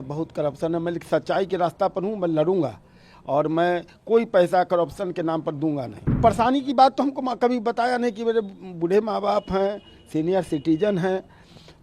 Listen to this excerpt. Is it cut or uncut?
cut